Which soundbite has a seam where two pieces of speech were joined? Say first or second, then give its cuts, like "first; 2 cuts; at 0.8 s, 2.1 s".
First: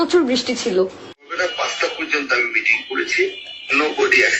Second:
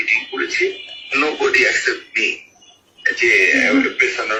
first; 1 cut; at 1.3 s